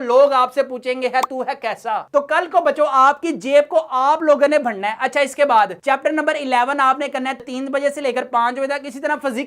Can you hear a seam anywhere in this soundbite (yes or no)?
no